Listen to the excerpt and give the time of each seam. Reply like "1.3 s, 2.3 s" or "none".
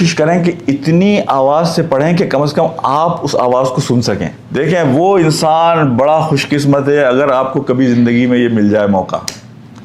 4.4 s